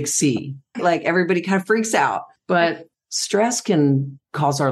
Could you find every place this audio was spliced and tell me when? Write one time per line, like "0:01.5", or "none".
0:00.8
0:02.3